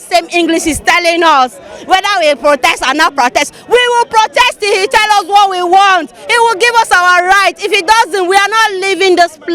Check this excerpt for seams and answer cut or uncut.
uncut